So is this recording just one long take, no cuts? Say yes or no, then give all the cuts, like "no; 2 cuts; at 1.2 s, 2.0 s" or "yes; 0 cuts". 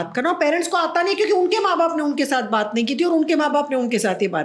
yes; 0 cuts